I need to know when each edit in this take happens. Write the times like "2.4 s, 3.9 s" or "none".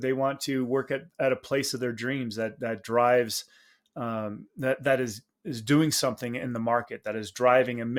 none